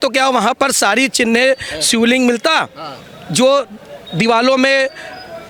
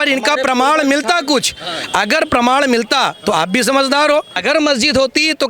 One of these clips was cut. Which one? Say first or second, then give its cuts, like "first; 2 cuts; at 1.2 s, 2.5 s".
second; 1 cut; at 4.3 s